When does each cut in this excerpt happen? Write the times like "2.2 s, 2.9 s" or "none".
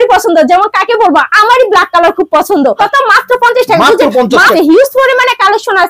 2.8 s, 4.5 s